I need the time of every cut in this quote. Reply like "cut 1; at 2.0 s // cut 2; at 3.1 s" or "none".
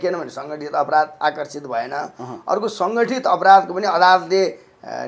none